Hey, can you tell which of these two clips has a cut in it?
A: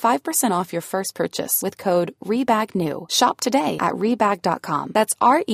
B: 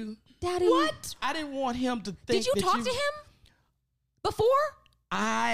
B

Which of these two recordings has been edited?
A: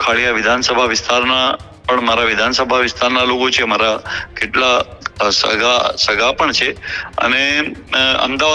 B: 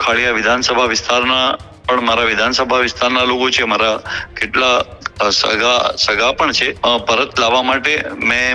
B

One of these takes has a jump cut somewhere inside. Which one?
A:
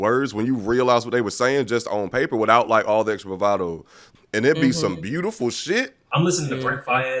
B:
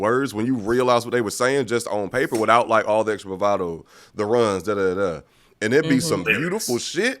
A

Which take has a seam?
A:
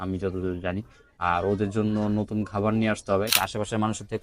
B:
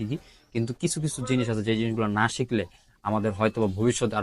A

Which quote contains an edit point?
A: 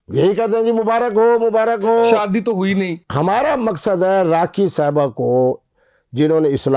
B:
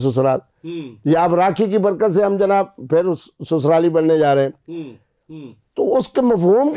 A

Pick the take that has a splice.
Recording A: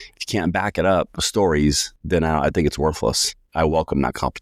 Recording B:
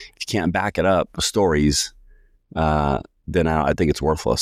A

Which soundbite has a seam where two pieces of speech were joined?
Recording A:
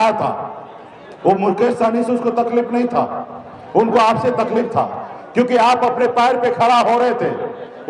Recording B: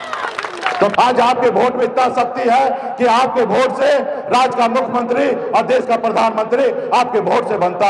B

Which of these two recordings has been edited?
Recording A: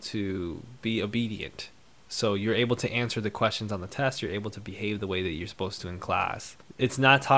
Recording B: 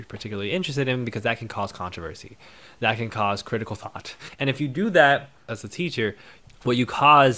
B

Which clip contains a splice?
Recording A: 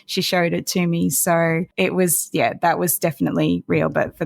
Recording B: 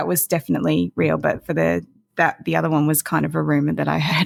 A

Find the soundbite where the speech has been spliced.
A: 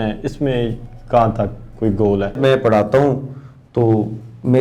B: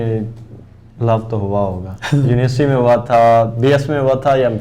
A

